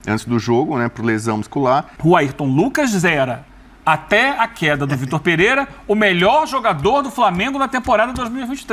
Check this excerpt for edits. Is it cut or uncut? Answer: cut